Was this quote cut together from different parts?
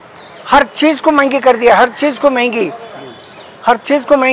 no; 0 cuts

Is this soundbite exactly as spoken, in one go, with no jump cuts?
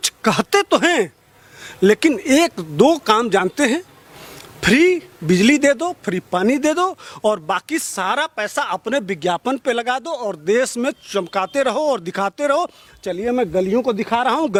yes; 0 cuts

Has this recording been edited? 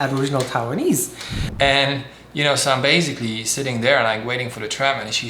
yes; 1 cut; at 1.5 s

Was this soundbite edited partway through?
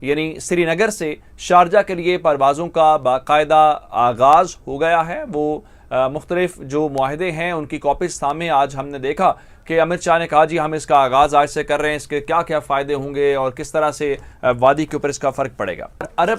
no; 0 cuts

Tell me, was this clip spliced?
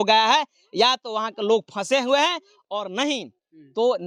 no; 0 cuts

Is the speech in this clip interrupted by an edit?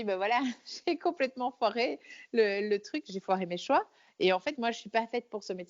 no; 0 cuts

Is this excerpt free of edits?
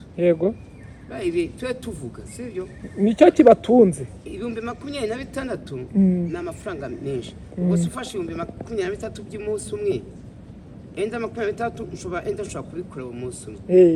yes; 0 cuts

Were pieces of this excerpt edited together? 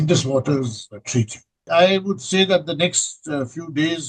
yes; 1 cut; at 1.6 s

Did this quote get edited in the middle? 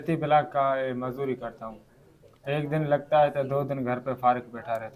no; 0 cuts

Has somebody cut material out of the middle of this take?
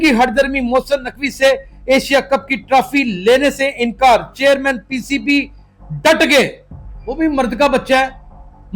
no; 0 cuts

